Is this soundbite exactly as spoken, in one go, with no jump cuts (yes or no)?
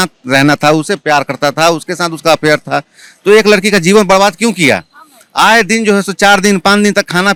yes